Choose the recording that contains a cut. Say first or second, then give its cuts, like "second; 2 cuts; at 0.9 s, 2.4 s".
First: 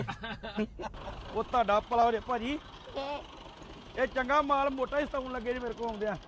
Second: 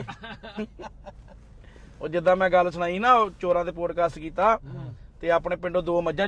first; 1 cut; at 1.1 s